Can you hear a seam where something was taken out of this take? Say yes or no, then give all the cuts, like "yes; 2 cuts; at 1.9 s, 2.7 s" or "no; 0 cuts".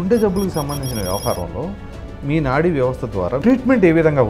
yes; 1 cut; at 3.4 s